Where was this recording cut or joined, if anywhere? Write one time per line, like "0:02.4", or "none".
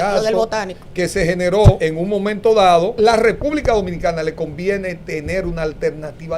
0:01.8
0:02.9